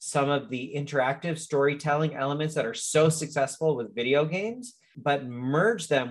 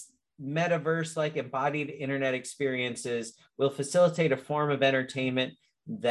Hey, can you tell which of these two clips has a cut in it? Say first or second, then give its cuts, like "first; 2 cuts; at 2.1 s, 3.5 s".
first; 1 cut; at 4.9 s